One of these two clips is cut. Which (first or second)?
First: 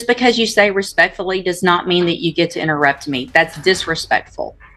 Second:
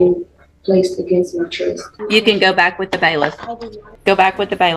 second